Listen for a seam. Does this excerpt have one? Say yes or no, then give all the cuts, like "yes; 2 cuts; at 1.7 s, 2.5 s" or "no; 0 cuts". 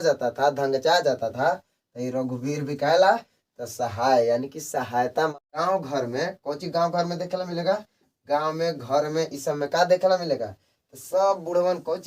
yes; 1 cut; at 5.3 s